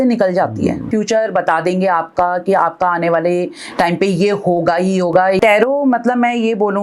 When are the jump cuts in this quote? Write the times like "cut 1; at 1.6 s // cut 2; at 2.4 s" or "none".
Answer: cut 1; at 0.8 s // cut 2; at 5.4 s